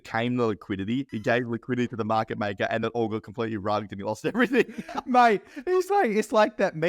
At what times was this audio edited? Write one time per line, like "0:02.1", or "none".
0:01.1
0:02.8